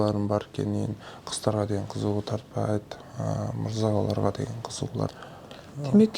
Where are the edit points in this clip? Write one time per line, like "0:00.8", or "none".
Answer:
0:05.1